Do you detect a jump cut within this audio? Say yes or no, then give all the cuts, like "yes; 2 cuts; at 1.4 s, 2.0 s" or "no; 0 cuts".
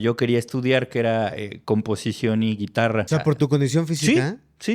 yes; 1 cut; at 3.1 s